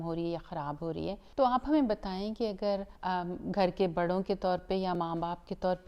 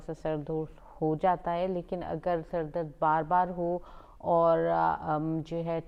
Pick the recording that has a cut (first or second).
first